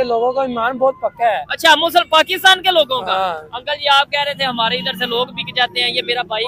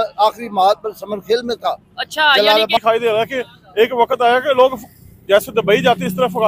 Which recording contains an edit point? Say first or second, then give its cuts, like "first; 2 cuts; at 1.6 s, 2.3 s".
second; 1 cut; at 2.8 s